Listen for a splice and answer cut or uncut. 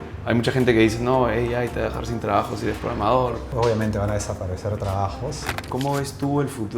cut